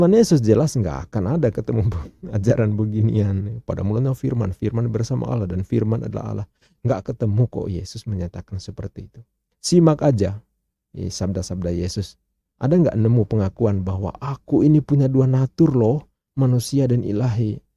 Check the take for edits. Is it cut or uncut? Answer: uncut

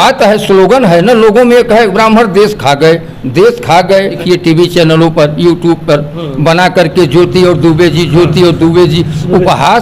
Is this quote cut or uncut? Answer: cut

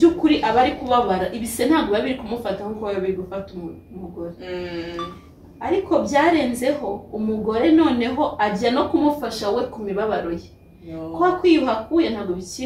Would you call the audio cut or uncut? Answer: uncut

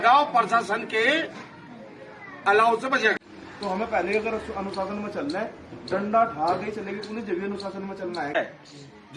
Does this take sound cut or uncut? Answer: cut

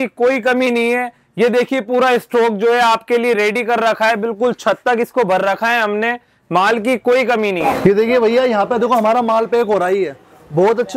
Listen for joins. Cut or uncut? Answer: uncut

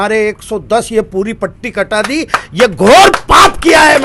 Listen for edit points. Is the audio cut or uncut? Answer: uncut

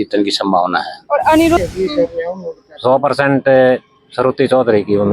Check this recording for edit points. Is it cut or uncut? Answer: cut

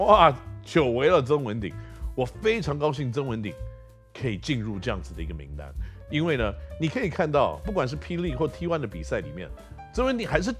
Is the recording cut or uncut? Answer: uncut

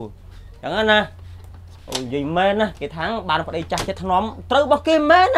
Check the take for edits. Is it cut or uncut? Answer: uncut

